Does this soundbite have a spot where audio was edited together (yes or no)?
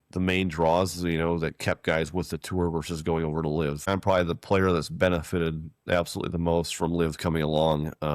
yes